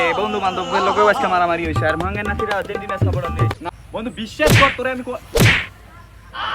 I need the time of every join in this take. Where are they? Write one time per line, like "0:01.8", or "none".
0:03.6

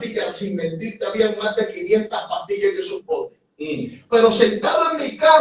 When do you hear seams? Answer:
none

